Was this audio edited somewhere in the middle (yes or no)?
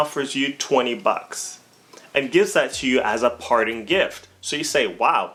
no